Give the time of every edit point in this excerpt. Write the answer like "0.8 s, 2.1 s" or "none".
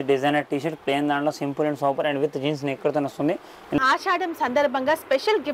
3.8 s